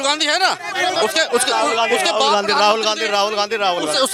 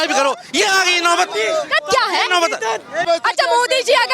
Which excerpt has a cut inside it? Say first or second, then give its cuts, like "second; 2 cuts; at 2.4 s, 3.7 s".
second; 1 cut; at 3.1 s